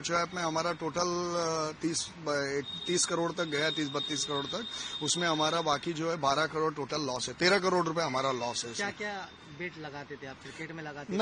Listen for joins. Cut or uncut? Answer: uncut